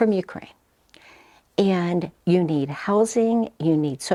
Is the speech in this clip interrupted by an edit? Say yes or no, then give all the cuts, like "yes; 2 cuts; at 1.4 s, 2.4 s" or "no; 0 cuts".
no; 0 cuts